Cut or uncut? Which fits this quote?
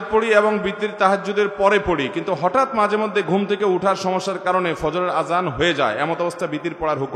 uncut